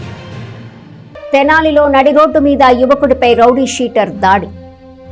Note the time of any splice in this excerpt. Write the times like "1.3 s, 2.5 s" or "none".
1.0 s